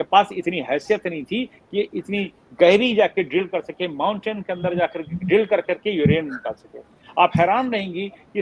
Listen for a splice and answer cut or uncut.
uncut